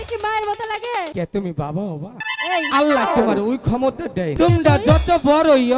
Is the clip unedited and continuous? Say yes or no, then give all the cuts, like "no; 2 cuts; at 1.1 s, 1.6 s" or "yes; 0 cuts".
no; 3 cuts; at 1.1 s, 2.3 s, 4.3 s